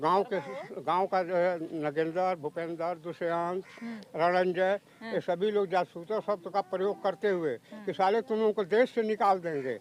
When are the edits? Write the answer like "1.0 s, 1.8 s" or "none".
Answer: none